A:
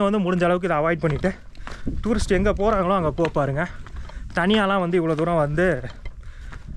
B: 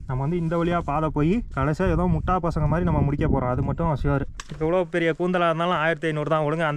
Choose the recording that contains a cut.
B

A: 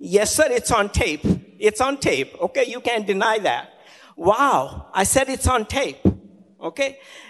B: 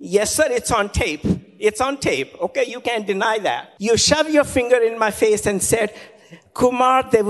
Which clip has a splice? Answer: B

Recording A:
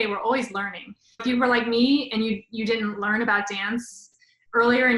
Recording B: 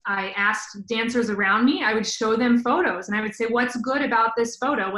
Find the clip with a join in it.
A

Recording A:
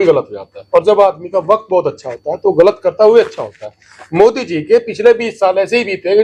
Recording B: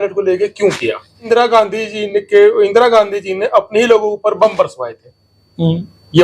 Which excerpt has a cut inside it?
B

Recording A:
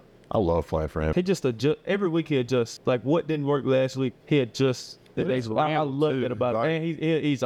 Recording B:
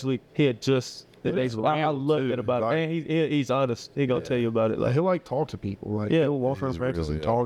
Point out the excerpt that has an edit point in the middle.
A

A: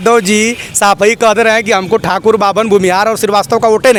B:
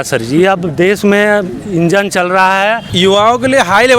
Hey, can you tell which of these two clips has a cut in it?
B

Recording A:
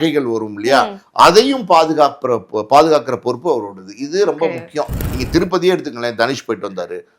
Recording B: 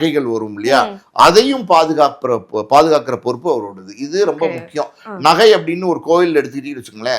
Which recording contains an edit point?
A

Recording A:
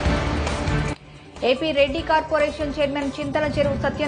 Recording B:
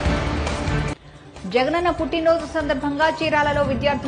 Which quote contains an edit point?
A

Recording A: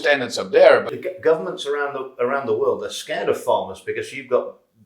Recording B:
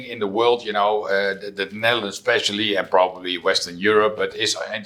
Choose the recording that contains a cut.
A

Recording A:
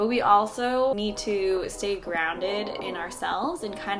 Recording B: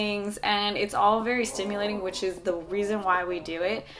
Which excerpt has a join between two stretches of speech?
A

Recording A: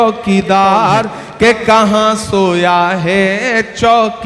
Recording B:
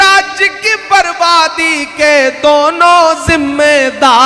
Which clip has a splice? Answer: A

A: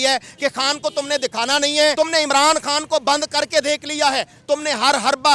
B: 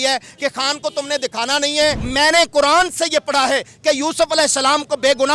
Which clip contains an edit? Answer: B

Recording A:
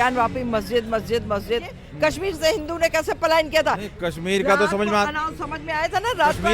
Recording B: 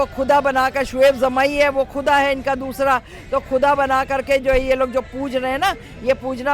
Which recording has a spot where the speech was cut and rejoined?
A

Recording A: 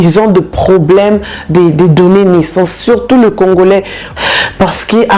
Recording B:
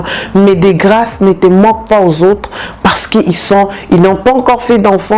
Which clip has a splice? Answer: A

